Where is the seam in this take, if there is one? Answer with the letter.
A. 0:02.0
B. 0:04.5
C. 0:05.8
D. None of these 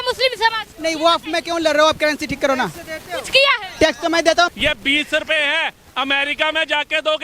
B